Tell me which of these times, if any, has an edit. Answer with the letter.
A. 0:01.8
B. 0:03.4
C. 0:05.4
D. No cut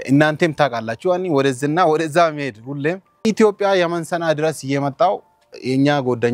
B